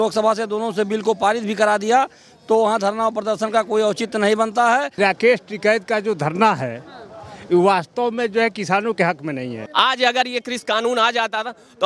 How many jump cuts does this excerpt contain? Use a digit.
2